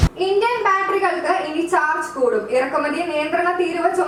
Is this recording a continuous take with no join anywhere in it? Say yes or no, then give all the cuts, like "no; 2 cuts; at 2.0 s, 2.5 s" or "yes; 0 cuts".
yes; 0 cuts